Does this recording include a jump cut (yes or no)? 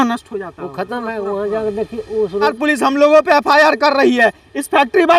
yes